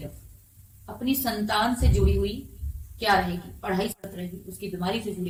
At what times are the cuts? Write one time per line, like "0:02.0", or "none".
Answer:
none